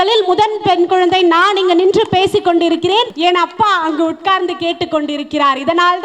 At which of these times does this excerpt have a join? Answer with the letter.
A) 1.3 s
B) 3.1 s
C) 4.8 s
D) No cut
B